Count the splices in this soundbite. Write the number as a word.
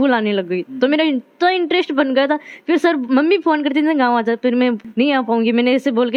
zero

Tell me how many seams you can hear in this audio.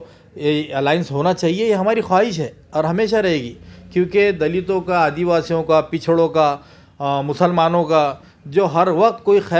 zero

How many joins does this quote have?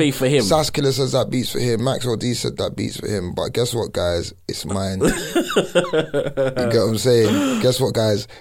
zero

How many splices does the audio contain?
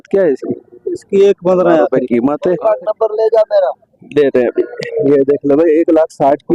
one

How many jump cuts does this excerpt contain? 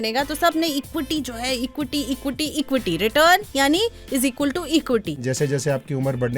one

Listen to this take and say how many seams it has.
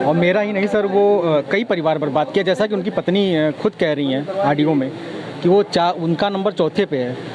zero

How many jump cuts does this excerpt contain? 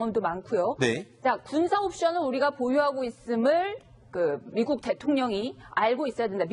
zero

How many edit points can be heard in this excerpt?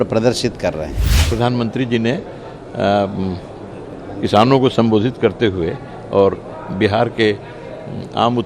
one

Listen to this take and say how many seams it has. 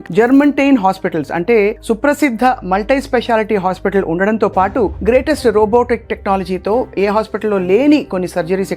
zero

